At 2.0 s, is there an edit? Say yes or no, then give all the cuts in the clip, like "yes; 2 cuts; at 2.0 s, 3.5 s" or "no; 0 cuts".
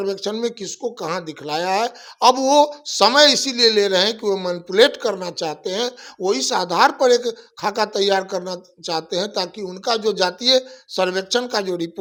no; 0 cuts